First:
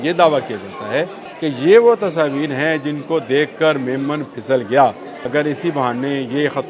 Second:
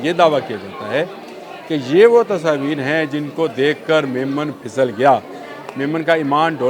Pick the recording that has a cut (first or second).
first